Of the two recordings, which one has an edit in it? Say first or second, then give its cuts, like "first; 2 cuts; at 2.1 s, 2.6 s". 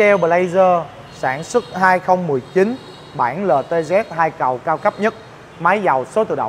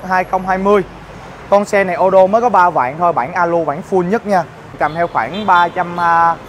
second; 1 cut; at 4.8 s